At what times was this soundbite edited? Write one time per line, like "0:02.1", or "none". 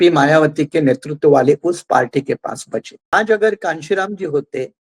0:03.1